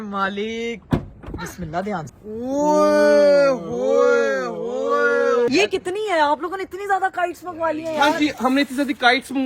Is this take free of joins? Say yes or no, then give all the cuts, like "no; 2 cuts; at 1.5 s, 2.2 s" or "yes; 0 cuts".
no; 2 cuts; at 2.1 s, 5.5 s